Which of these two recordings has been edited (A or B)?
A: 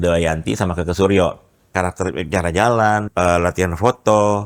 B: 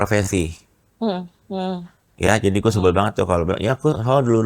A